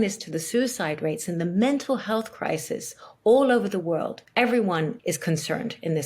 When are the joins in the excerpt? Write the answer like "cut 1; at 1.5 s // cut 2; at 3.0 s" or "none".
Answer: cut 1; at 5.0 s